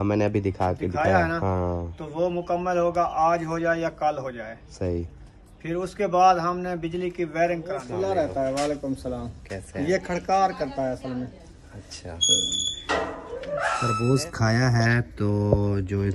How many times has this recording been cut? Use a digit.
2